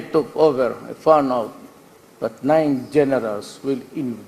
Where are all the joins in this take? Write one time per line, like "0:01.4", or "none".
none